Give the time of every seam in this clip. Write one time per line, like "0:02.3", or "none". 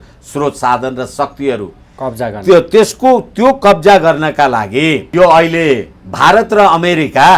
0:05.0